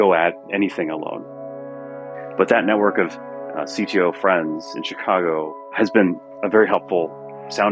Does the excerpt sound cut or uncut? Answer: cut